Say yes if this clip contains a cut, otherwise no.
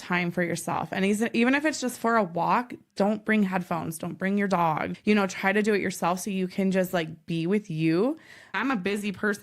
yes